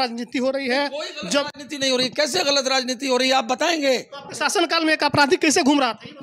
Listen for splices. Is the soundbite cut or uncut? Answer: uncut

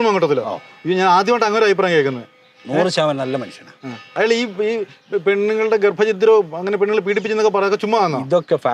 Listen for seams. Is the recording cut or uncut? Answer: uncut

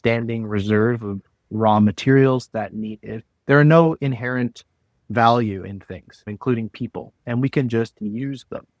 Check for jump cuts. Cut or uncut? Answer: uncut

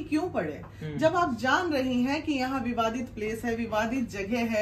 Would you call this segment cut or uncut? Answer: uncut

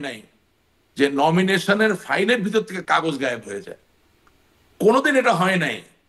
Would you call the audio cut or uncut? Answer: uncut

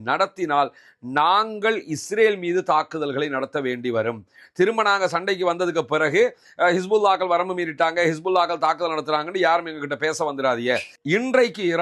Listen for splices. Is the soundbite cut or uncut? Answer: cut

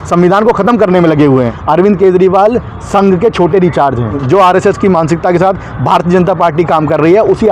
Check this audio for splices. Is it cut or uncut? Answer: cut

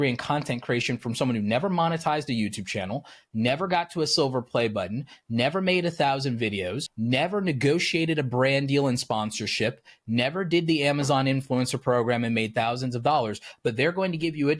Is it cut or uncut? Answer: cut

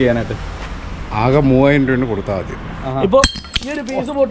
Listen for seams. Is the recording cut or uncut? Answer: cut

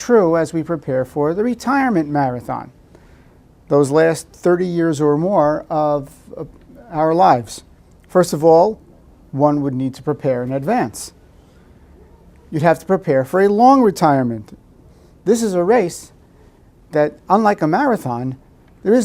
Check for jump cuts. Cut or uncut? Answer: cut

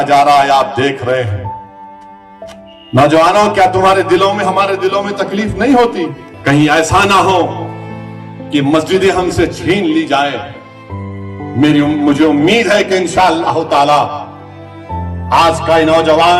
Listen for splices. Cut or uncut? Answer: uncut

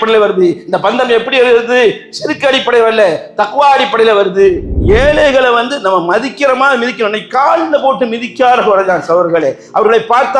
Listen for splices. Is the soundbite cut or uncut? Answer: cut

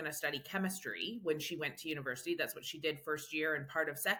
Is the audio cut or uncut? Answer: uncut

